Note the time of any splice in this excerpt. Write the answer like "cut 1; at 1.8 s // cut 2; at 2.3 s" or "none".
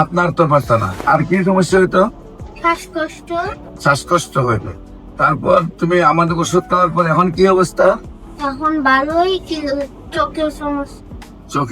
cut 1; at 1.0 s // cut 2; at 3.7 s